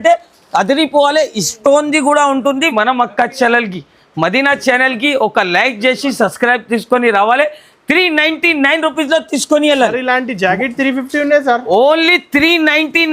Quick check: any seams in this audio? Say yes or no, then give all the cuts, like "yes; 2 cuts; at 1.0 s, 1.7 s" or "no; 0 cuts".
yes; 1 cut; at 2.7 s